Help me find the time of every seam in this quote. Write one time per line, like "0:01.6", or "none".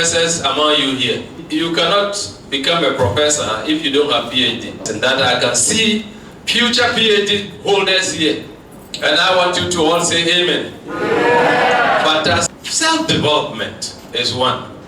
0:01.4
0:04.9
0:12.6